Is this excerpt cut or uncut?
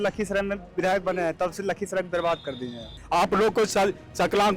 cut